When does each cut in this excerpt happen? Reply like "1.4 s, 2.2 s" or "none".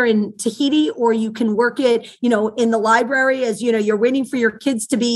none